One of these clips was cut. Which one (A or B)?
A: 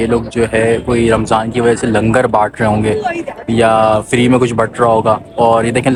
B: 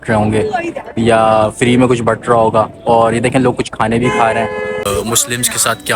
B